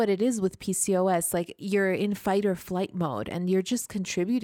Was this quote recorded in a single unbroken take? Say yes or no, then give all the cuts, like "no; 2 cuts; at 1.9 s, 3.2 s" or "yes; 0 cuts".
no; 1 cut; at 1.6 s